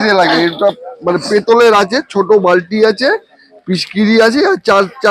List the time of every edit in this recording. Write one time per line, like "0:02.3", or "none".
none